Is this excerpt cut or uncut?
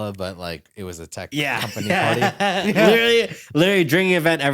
uncut